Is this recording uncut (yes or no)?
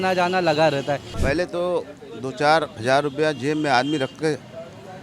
no